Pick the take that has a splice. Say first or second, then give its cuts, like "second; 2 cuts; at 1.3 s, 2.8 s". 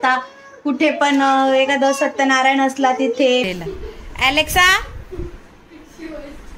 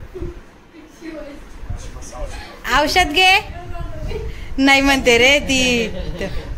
first; 1 cut; at 3.6 s